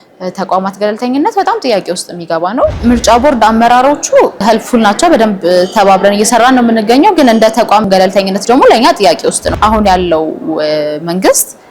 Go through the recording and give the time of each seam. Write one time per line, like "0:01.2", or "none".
0:02.7
0:04.4
0:07.8
0:09.5